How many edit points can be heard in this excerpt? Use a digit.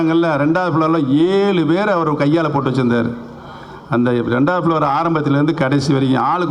0